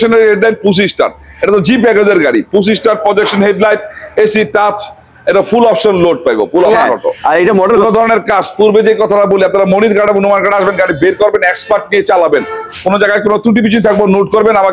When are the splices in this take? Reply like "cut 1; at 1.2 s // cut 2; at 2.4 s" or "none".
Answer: cut 1; at 7.8 s